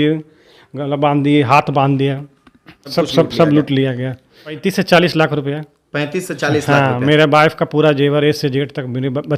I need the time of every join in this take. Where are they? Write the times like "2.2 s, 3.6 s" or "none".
2.8 s, 4.6 s